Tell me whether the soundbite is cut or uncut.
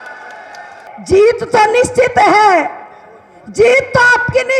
cut